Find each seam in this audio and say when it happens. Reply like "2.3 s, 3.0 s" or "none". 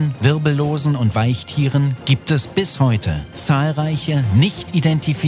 none